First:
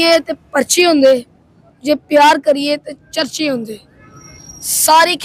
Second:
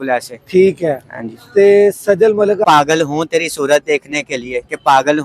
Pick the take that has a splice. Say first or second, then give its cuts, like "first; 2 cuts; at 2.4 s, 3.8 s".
second; 1 cut; at 2.6 s